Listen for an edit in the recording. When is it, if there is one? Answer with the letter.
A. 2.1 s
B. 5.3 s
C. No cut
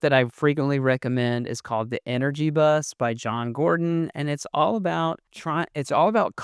B